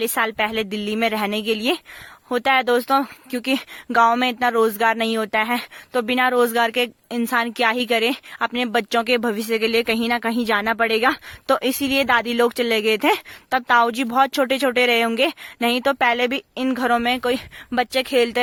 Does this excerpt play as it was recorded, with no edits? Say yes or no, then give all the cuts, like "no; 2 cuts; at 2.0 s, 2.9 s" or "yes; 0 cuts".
yes; 0 cuts